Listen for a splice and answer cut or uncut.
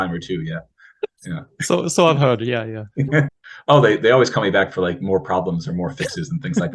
cut